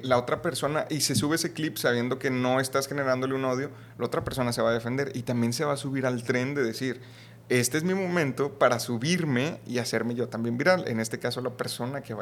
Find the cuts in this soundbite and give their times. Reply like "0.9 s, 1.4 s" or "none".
none